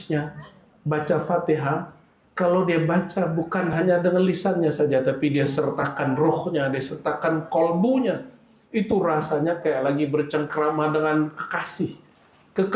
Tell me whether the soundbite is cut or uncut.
uncut